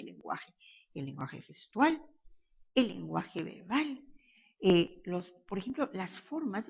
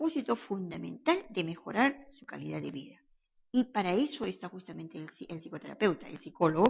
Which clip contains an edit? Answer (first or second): second